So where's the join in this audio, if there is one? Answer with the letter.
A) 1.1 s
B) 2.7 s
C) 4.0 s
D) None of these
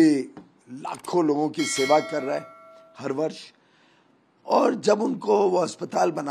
D